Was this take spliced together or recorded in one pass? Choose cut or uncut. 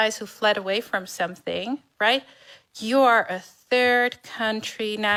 uncut